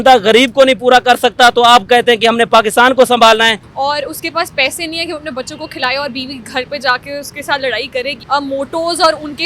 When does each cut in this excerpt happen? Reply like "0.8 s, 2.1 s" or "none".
3.6 s, 8.2 s